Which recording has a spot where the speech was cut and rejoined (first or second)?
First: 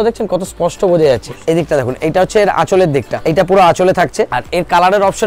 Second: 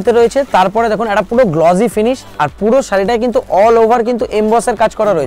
first